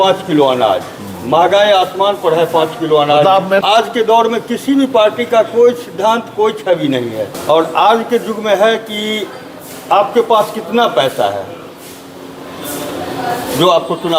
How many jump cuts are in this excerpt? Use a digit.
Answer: 2